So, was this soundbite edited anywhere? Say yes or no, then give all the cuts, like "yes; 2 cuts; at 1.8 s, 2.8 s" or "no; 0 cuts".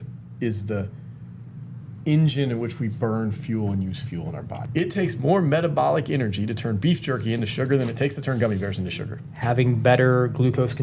yes; 2 cuts; at 4.6 s, 9.3 s